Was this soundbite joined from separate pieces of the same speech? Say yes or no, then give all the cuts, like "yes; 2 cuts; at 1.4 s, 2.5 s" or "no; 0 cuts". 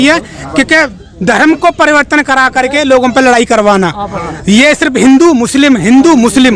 no; 0 cuts